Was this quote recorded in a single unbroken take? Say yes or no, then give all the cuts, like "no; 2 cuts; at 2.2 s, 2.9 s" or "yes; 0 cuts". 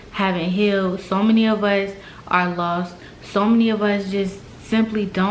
yes; 0 cuts